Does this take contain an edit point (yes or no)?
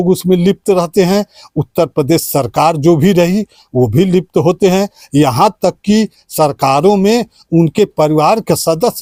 no